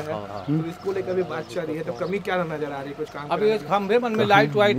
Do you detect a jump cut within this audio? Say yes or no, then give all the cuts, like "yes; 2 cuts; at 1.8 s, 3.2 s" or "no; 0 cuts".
no; 0 cuts